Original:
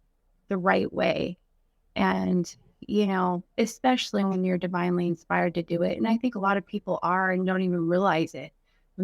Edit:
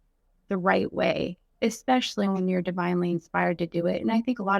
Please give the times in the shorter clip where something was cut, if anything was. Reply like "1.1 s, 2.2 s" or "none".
1.5 s